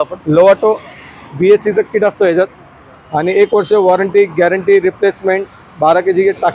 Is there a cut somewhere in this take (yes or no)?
no